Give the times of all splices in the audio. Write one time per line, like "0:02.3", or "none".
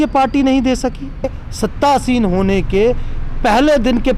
0:01.3